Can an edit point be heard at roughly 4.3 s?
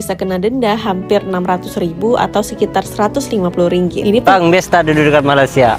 yes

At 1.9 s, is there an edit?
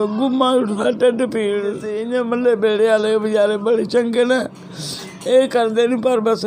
yes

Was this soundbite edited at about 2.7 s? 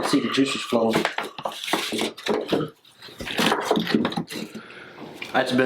no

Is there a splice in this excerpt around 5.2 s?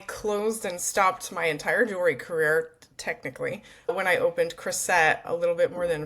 yes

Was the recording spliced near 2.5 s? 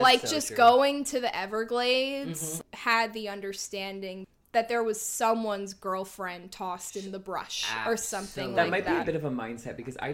yes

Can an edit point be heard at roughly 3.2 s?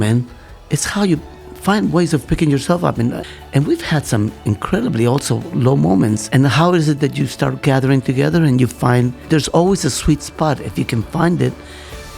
yes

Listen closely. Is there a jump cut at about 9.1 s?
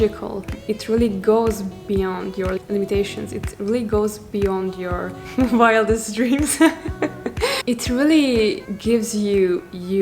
no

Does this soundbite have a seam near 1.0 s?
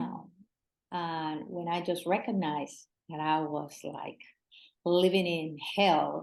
no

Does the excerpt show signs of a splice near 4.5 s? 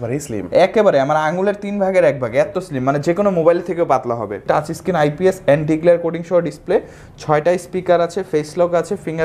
yes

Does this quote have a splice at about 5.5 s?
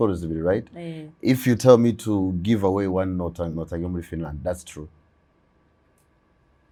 no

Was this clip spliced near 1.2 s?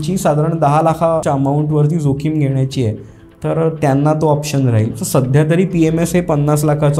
yes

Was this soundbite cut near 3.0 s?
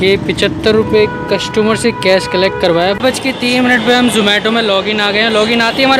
yes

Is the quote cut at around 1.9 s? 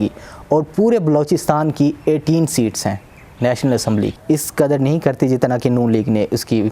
no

